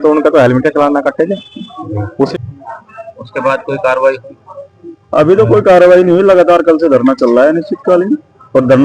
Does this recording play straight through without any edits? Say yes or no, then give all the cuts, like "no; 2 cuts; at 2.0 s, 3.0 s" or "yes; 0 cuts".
no; 1 cut; at 2.3 s